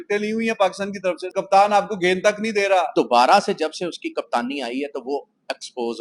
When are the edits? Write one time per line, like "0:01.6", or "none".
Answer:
0:01.2
0:02.9